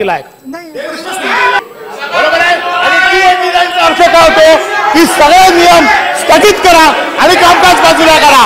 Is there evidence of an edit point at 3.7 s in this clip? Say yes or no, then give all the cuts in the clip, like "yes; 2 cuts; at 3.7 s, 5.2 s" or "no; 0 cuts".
no; 1 cut; at 1.6 s